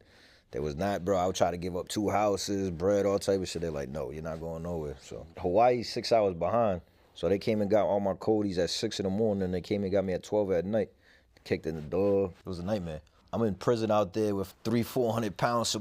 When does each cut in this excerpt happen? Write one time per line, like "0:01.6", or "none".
0:05.3
0:12.3
0:13.2
0:14.5